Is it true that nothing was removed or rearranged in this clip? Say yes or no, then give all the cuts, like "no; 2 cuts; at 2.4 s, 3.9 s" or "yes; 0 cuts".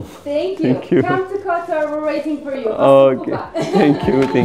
yes; 0 cuts